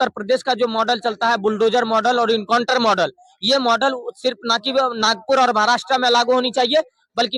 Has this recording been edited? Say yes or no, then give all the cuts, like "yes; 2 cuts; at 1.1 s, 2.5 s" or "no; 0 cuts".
no; 0 cuts